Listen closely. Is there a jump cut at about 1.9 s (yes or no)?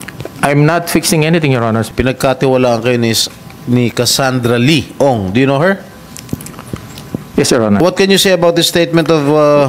yes